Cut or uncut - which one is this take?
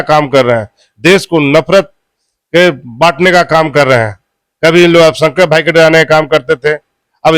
uncut